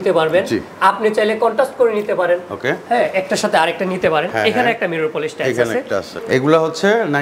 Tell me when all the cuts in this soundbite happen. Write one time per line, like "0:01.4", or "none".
0:06.1